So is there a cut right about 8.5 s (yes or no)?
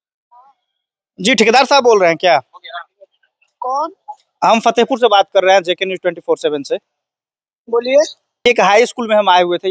yes